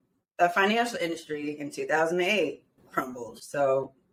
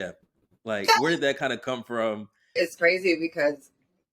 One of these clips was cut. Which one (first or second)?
second